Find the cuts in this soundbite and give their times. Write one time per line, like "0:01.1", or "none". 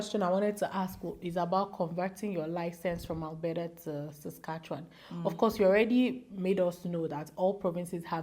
none